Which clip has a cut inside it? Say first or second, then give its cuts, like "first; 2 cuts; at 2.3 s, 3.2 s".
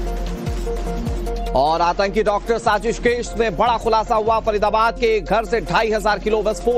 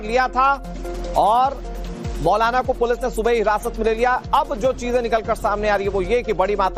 first; 1 cut; at 1.0 s